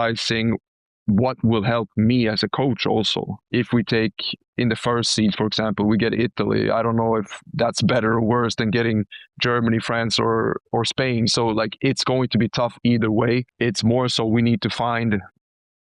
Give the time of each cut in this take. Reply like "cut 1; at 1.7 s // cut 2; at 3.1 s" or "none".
cut 1; at 3.4 s // cut 2; at 13.5 s